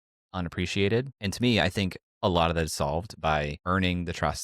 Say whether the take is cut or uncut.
cut